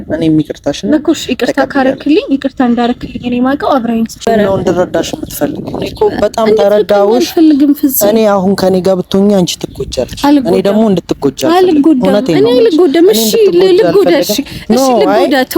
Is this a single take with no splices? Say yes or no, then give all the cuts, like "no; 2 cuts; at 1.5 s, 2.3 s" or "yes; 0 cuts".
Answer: no; 1 cut; at 4.2 s